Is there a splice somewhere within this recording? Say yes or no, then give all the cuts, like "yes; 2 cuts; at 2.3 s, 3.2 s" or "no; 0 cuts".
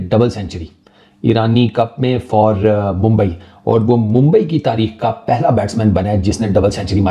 no; 0 cuts